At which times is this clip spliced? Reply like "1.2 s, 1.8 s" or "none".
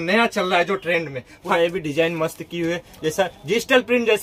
1.4 s